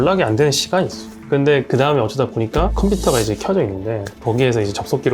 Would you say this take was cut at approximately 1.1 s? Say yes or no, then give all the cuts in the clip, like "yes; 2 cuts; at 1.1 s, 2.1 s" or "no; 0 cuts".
yes; 1 cut; at 1.1 s